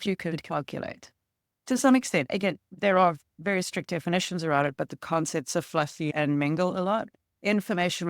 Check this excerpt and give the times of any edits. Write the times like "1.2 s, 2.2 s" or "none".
2.7 s